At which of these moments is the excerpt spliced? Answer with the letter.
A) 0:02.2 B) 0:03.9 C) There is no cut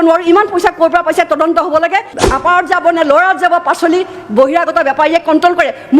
A